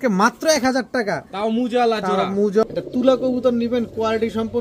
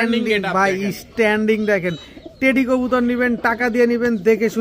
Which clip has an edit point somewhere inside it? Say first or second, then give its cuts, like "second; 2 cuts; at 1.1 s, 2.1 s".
first; 1 cut; at 2.6 s